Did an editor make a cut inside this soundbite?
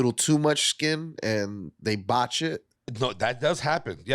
yes; 1 cut; at 2.8 s

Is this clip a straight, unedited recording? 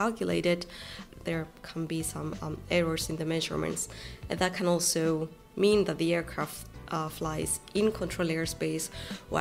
no; 1 cut; at 1.2 s

